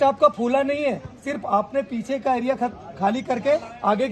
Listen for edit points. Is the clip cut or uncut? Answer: uncut